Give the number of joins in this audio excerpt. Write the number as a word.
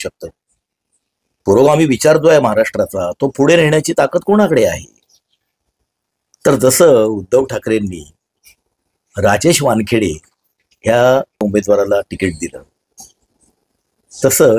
one